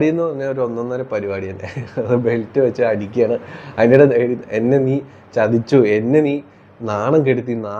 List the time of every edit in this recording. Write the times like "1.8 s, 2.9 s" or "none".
none